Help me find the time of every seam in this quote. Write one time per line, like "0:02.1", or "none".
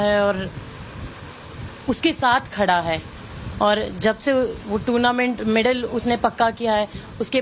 0:05.8